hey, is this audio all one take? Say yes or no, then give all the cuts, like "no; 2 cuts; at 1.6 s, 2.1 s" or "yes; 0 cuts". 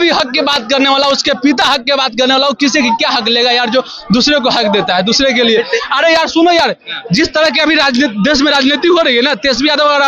yes; 0 cuts